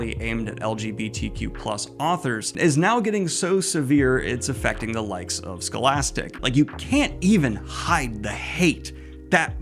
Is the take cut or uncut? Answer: cut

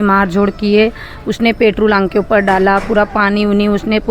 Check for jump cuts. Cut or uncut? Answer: uncut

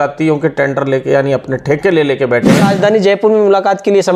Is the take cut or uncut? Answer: cut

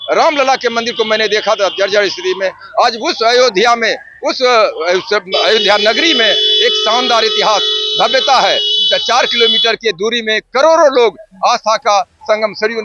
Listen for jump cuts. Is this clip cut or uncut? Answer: uncut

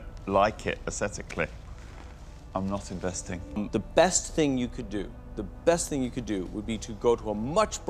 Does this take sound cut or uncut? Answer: uncut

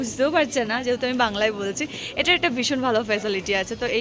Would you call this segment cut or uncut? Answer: uncut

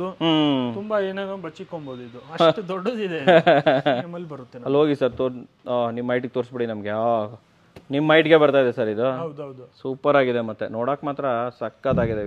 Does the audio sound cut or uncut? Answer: cut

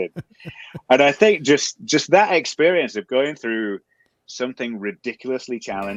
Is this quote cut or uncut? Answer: uncut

